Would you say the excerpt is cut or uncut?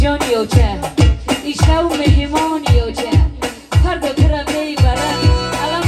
uncut